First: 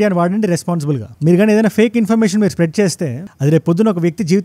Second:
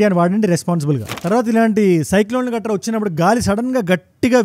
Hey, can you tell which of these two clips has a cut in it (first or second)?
second